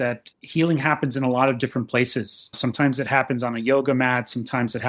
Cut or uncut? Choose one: cut